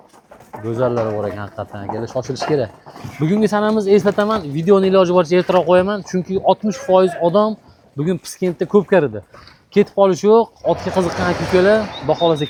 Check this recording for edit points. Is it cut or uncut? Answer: uncut